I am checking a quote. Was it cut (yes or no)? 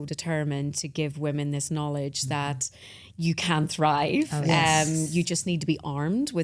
no